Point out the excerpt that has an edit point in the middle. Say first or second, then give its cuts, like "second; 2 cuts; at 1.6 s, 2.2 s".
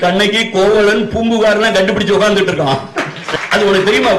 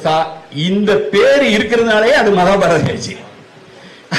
first; 1 cut; at 3.2 s